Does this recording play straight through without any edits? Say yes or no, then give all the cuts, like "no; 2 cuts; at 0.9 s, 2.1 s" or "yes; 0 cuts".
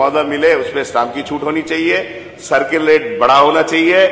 yes; 0 cuts